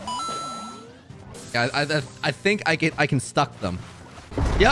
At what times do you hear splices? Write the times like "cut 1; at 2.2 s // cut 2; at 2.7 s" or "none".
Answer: cut 1; at 1.3 s